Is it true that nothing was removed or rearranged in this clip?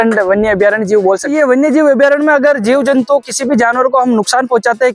no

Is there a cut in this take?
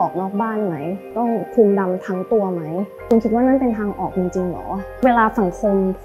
yes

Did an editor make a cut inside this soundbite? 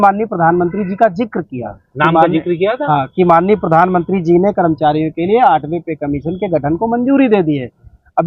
no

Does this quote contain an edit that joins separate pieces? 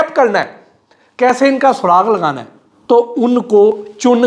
no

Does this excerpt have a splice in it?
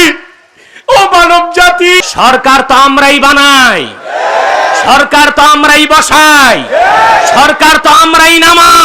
yes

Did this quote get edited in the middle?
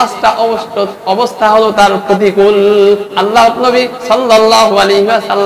yes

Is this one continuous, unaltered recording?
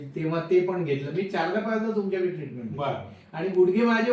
yes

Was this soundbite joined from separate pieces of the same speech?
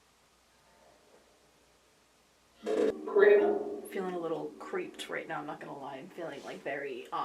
yes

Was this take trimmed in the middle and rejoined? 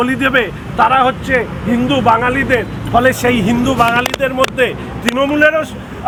no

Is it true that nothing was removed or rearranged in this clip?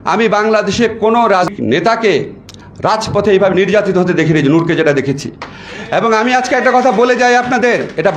no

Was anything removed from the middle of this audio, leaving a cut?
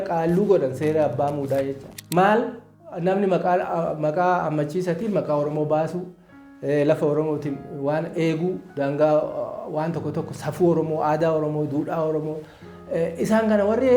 no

